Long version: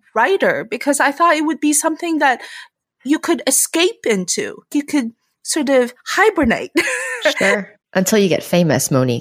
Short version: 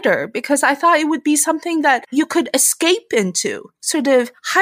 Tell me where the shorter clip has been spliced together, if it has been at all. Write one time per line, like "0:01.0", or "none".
0:02.1
0:03.6